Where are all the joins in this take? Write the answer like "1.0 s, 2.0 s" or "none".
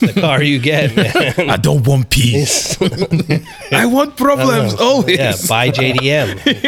none